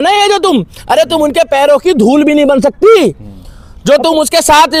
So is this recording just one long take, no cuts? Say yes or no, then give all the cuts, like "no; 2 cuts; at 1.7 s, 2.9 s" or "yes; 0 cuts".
yes; 0 cuts